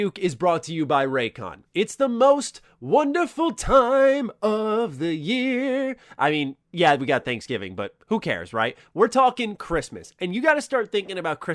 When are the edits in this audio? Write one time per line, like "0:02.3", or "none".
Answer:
none